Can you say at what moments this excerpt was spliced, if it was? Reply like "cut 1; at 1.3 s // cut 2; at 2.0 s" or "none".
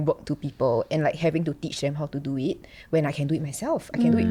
none